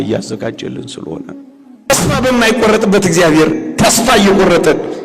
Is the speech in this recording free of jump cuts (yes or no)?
no